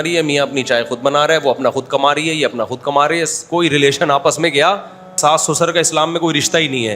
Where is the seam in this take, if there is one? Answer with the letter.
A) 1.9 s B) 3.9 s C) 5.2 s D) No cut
C